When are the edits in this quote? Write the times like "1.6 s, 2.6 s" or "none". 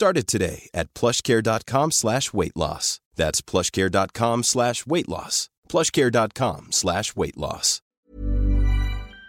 8.1 s

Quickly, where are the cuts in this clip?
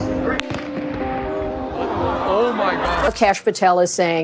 3.1 s

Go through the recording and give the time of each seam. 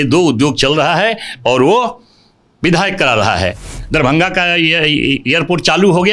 3.7 s

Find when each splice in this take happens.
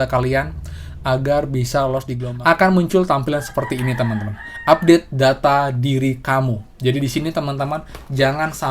2.2 s

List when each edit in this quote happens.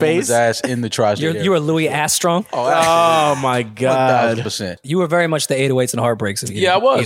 4.8 s

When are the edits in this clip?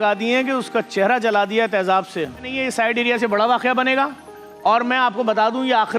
2.5 s

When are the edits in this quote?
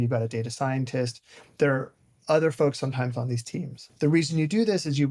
3.8 s

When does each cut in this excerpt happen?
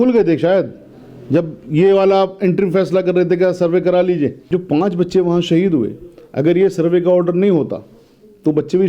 4.4 s

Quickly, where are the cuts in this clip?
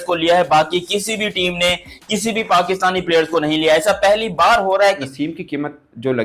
5.0 s

